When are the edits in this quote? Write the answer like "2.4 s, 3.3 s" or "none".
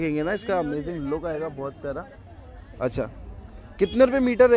none